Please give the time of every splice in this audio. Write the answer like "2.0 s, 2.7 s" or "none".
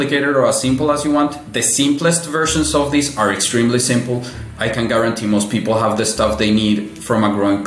none